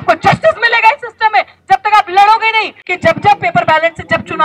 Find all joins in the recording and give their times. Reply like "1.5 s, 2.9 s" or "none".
2.8 s